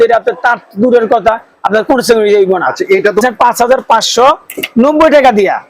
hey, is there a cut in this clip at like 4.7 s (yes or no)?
no